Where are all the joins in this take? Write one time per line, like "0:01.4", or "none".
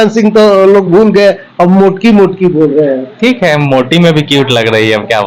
none